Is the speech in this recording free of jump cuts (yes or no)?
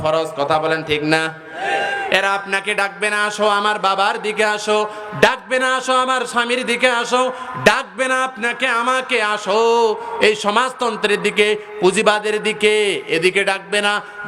no